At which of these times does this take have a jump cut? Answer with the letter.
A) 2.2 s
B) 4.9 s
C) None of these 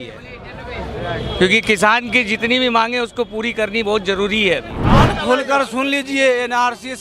B